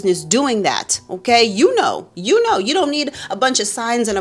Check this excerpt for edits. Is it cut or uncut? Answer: uncut